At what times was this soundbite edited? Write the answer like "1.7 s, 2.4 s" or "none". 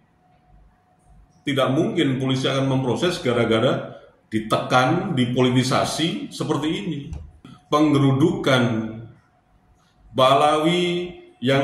7.5 s